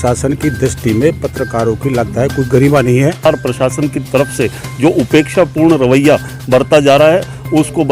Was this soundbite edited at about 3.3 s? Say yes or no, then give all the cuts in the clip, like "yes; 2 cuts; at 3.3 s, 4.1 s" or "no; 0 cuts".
yes; 1 cut; at 3.3 s